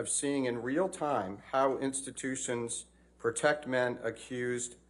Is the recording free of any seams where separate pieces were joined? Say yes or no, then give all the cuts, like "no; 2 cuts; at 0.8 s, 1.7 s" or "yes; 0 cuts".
yes; 0 cuts